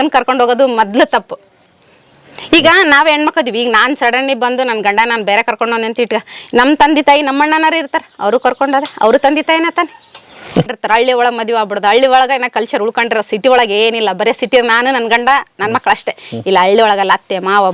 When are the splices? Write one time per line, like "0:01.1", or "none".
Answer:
0:10.7